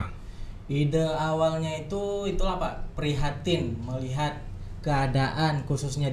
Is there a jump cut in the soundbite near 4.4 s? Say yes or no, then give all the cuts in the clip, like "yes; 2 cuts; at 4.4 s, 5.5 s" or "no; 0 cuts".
no; 0 cuts